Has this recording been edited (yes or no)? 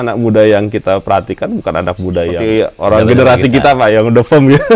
yes